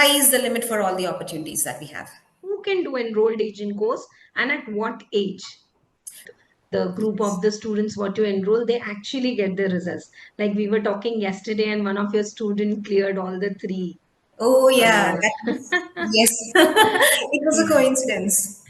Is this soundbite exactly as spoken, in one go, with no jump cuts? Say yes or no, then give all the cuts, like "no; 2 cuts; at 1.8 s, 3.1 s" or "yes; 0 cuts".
no; 2 cuts; at 2.6 s, 6.3 s